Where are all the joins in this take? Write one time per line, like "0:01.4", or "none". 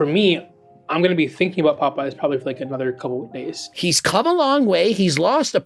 0:03.7